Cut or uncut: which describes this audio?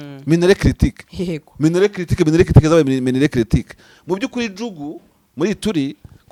uncut